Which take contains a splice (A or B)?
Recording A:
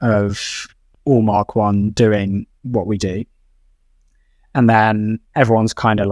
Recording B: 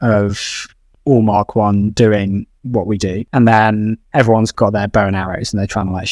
B